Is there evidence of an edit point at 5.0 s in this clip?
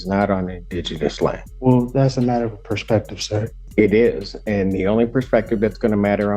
no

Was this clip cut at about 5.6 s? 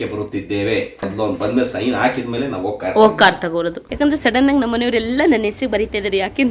no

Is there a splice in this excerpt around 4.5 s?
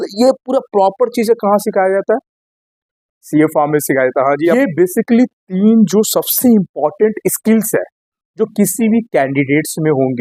yes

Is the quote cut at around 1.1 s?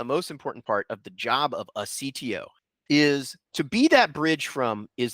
no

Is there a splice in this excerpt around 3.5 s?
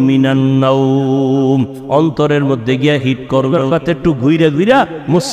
yes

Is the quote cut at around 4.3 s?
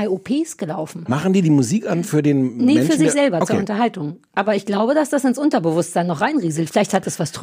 no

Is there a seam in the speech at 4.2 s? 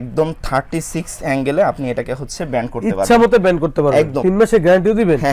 yes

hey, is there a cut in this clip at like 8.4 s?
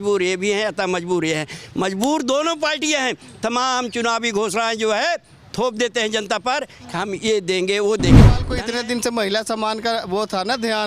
yes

